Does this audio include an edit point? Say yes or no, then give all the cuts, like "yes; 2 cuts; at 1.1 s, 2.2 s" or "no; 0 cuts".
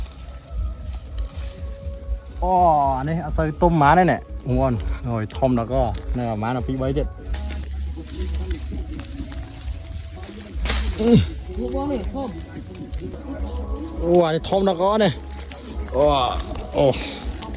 yes; 2 cuts; at 7.3 s, 13.2 s